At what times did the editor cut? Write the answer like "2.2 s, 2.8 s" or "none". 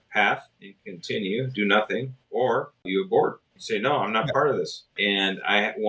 2.8 s, 3.5 s, 4.9 s